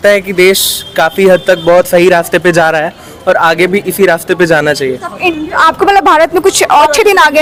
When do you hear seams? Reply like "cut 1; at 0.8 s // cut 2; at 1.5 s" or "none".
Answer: none